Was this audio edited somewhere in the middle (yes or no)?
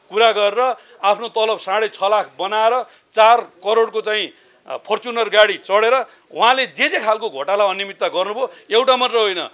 no